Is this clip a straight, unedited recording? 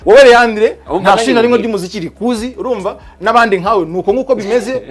yes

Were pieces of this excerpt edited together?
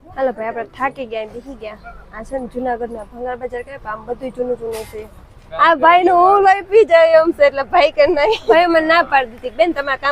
yes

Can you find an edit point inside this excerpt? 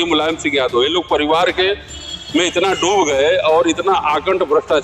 no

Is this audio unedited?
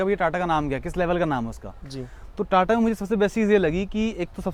yes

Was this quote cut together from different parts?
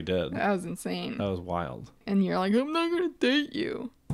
yes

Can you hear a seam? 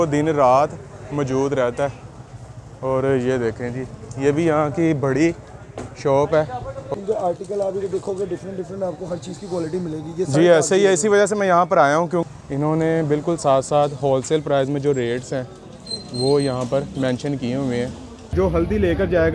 yes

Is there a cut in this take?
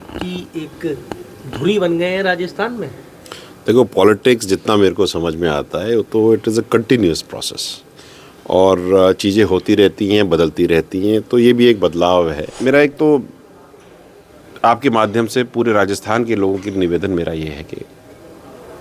yes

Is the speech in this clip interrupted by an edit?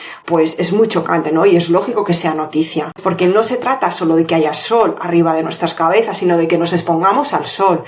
yes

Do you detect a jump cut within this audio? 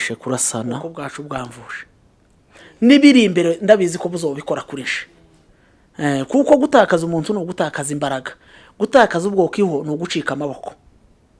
yes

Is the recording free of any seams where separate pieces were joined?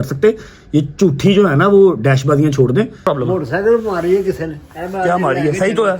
no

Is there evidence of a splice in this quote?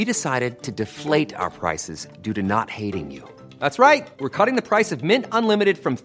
no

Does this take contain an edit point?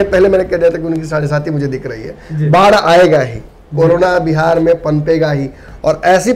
no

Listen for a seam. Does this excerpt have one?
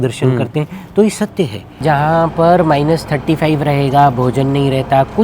yes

